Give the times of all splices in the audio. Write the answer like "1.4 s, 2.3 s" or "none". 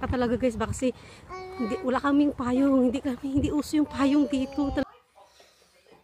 4.8 s